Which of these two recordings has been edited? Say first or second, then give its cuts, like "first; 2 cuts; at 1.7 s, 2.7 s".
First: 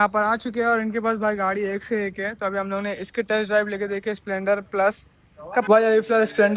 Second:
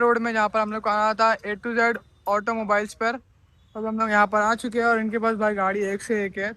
first; 1 cut; at 5.7 s